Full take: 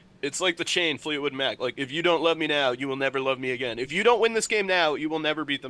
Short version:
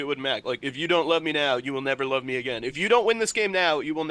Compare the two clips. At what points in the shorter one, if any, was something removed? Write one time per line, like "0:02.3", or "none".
none